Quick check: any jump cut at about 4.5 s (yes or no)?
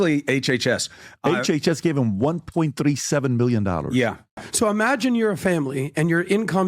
yes